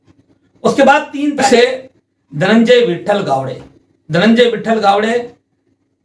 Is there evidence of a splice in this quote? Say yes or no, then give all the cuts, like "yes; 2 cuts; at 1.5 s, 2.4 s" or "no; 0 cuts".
yes; 1 cut; at 1.5 s